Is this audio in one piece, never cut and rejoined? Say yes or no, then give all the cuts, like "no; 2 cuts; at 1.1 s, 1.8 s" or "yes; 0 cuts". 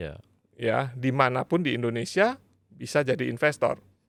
yes; 0 cuts